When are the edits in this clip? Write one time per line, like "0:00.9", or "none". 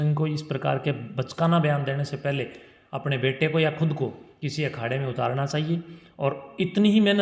none